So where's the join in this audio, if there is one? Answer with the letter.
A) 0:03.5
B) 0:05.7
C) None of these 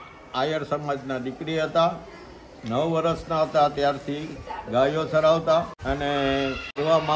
C